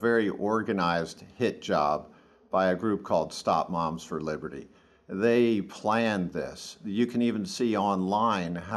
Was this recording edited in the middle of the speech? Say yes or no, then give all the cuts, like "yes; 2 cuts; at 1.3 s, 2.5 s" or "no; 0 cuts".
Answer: no; 0 cuts